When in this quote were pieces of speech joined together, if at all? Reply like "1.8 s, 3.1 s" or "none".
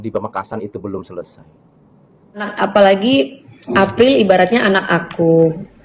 2.5 s